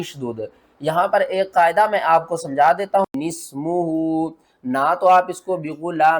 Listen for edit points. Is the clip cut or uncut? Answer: cut